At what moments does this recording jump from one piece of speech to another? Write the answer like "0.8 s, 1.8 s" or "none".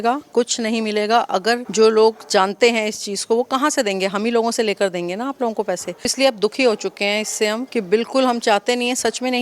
1.7 s, 6.1 s, 7.6 s